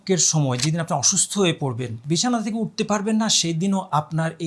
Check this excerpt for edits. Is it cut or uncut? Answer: cut